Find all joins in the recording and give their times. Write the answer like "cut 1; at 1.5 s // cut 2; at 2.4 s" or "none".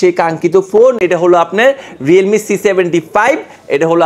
none